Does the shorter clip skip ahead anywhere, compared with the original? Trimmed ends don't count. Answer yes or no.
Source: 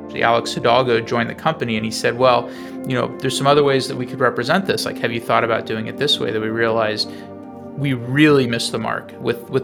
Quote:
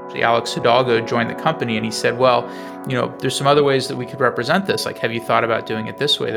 no